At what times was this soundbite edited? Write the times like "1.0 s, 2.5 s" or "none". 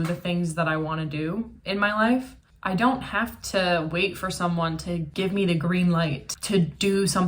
2.4 s, 5.1 s, 6.2 s